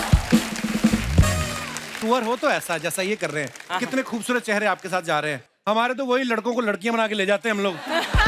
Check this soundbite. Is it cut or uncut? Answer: cut